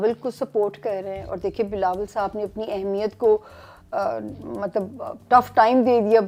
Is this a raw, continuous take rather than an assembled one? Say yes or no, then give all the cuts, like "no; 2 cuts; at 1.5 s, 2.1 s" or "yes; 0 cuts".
yes; 0 cuts